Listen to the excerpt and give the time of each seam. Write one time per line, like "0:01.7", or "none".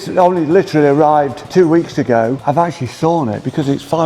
0:01.4
0:02.4